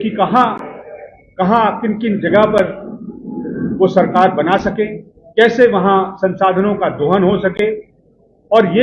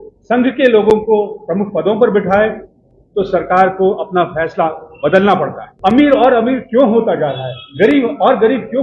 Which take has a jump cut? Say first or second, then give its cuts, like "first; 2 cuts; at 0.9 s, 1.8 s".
second; 1 cut; at 5.6 s